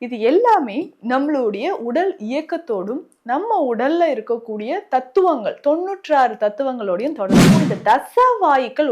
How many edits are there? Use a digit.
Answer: 1